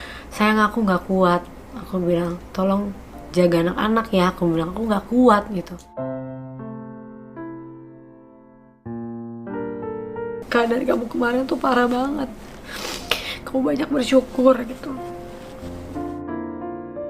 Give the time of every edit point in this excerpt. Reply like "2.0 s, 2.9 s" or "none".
10.4 s